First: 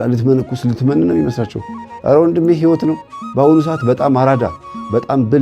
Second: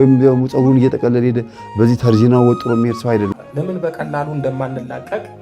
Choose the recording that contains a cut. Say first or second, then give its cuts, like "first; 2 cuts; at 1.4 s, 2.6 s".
second; 1 cut; at 3.3 s